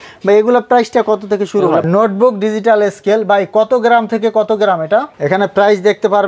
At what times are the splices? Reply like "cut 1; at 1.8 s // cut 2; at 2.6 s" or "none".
cut 1; at 1.9 s // cut 2; at 5.1 s